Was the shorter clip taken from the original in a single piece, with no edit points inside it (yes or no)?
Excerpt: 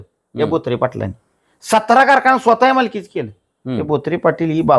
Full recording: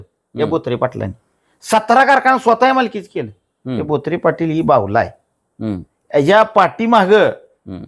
yes